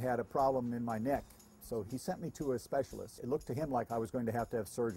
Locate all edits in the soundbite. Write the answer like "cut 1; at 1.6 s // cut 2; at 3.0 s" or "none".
cut 1; at 1.9 s // cut 2; at 3.2 s